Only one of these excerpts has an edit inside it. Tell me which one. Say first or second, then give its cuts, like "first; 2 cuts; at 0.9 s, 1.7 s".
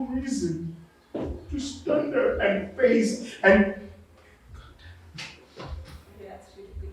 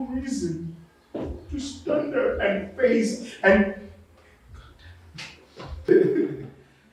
second; 1 cut; at 5.9 s